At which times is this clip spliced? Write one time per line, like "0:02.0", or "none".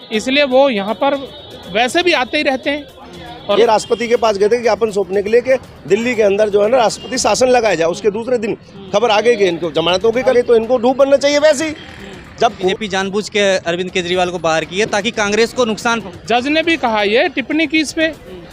0:03.4
0:10.3
0:12.7
0:16.1

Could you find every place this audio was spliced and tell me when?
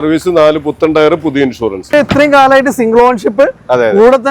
0:01.9

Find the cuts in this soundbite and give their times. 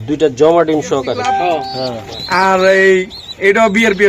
0:01.5

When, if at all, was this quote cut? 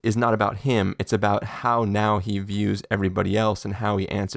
none

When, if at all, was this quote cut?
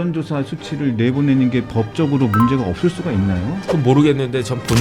none

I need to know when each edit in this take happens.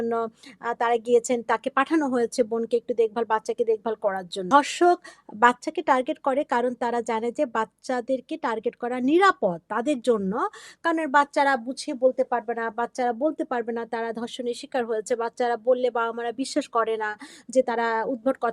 0:04.5

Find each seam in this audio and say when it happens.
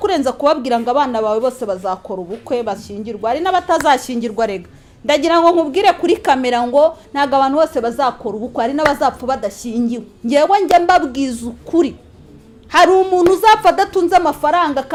none

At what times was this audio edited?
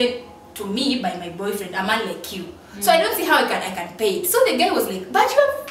none

